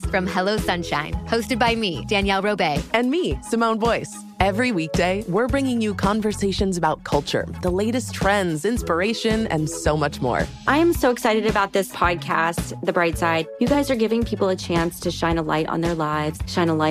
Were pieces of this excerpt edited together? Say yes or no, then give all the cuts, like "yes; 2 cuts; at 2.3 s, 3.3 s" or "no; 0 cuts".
no; 0 cuts